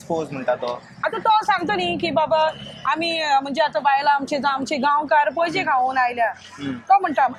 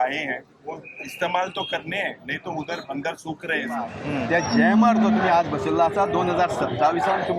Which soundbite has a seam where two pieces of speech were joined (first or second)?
second